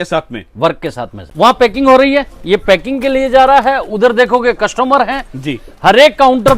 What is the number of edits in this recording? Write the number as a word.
one